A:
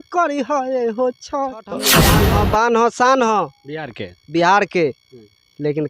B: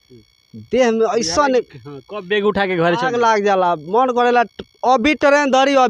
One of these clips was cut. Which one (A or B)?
A